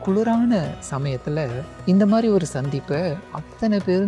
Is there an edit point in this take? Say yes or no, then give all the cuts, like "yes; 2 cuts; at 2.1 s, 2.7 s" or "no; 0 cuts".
yes; 1 cut; at 1.6 s